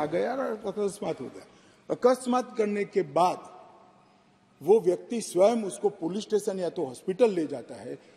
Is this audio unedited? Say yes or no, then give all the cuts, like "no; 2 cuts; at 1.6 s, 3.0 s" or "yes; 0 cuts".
yes; 0 cuts